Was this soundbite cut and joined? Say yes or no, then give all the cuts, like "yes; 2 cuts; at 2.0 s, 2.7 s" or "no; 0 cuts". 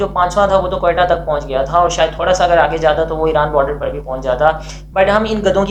no; 0 cuts